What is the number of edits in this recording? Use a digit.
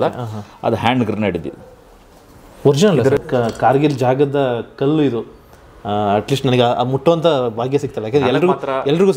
1